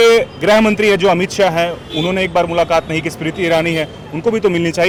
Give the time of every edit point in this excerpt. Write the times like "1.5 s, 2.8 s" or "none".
none